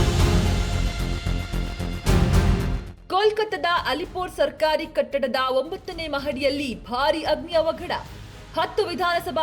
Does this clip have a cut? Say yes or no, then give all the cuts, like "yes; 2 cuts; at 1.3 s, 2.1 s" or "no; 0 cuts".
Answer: no; 0 cuts